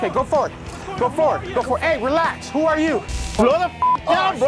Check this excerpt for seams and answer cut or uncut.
cut